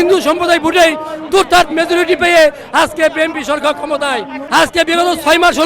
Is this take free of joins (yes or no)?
no